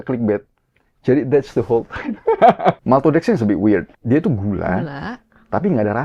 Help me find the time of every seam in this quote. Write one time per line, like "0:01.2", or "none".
0:02.8
0:03.9